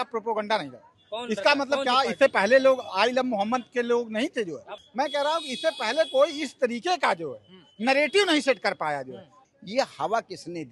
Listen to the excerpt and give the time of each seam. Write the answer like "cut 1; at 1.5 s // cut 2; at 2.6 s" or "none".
cut 1; at 4.7 s // cut 2; at 9.3 s